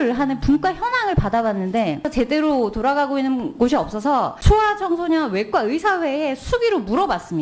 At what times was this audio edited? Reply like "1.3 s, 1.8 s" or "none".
2.1 s, 4.4 s

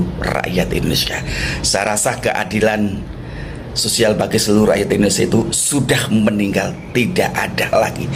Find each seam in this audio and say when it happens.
none

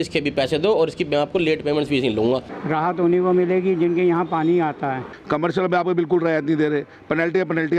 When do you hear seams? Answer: 2.5 s, 5.1 s

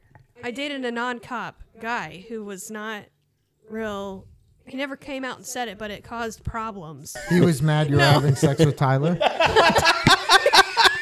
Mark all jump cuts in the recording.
7.2 s

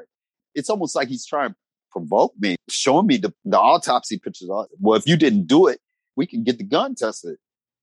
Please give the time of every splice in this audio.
1.8 s, 2.6 s, 3.3 s, 4.7 s, 6.1 s

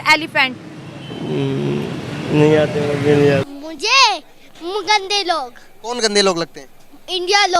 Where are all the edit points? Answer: 3.5 s

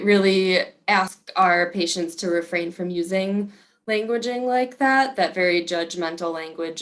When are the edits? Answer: 1.2 s

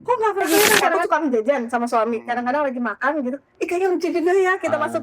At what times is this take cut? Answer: 1.0 s

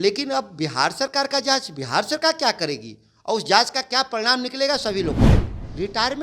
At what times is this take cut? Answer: 5.2 s

